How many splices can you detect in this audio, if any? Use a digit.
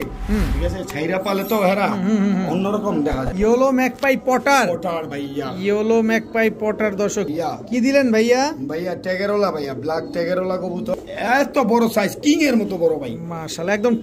3